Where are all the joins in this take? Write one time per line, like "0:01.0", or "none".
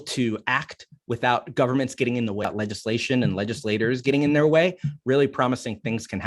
0:02.4